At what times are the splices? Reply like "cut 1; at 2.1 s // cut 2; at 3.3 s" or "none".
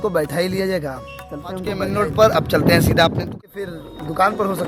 cut 1; at 1.8 s // cut 2; at 3.3 s